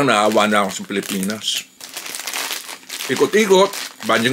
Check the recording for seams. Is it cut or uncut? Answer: uncut